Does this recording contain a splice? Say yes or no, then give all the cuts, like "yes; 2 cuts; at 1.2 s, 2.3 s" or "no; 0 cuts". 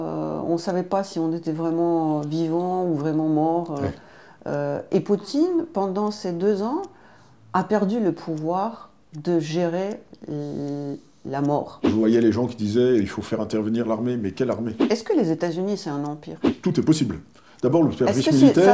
yes; 3 cuts; at 11.9 s, 14.8 s, 16.5 s